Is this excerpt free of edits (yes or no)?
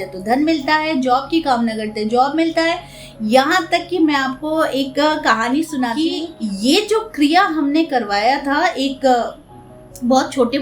no